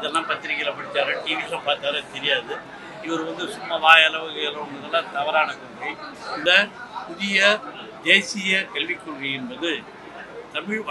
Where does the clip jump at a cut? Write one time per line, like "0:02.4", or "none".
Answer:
0:06.4